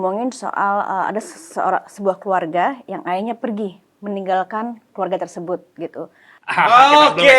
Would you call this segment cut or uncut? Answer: cut